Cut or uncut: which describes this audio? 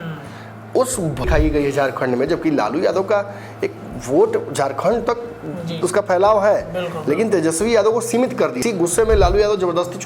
cut